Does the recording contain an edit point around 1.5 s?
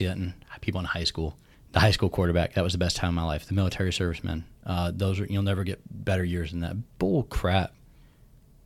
yes; 1 cut; at 1.5 s

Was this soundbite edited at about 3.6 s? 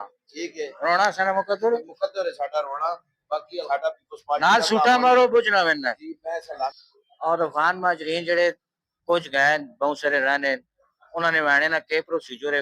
yes; 2 cuts; at 3.6 s, 6.7 s

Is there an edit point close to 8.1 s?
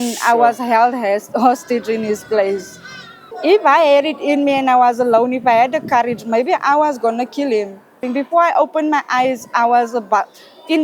yes; 2 cuts; at 3.3 s, 8.1 s

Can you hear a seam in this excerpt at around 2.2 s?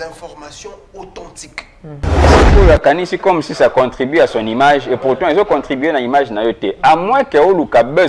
yes; 1 cut; at 2.2 s

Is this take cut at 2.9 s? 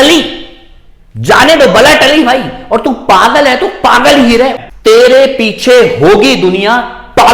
no; 1 cut; at 4.6 s

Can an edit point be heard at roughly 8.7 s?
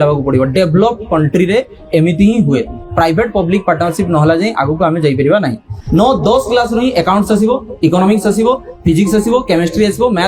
no; 1 cut; at 5.7 s

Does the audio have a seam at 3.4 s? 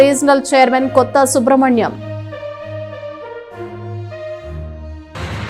no; 0 cuts

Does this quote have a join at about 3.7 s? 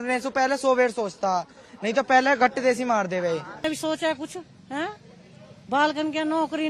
yes; 1 cut; at 3.7 s

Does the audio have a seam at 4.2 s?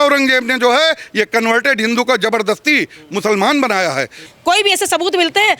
yes; 1 cut; at 4.2 s

